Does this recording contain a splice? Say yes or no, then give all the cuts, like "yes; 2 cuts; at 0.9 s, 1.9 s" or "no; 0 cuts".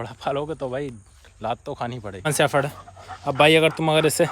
yes; 1 cut; at 2.3 s